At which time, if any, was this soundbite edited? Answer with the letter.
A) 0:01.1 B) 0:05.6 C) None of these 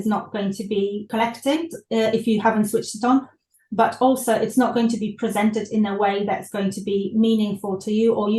A